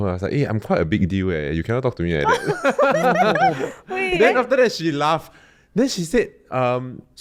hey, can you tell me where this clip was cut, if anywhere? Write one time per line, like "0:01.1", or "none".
none